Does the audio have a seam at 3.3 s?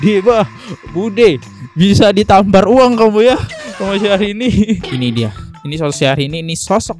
no; 1 cut; at 4.9 s

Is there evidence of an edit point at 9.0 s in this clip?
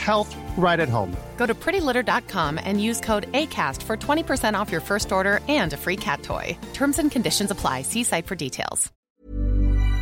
yes; 1 cut; at 9.0 s

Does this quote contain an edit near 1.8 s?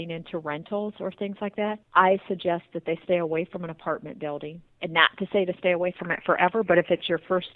yes; 2 cuts; at 1.8 s, 4.7 s

